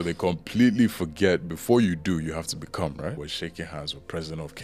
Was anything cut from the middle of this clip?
yes; 1 cut; at 3.3 s

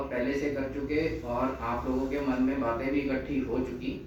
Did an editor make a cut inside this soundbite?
no; 0 cuts

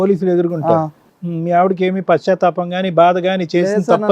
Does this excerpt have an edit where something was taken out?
yes; 1 cut; at 1.0 s

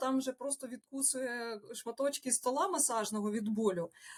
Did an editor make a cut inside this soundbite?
no; 0 cuts

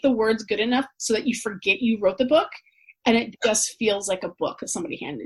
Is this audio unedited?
yes; 0 cuts

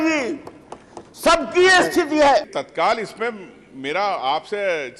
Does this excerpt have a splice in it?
yes; 1 cut; at 2.6 s

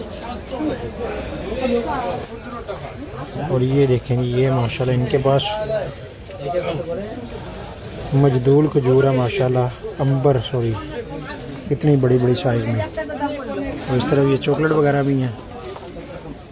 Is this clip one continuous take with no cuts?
yes; 0 cuts

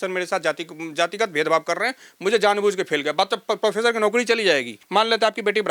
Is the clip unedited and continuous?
no; 1 cut; at 4.8 s

